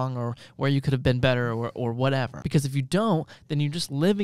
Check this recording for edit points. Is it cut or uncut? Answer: cut